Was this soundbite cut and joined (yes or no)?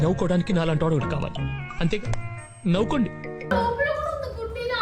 no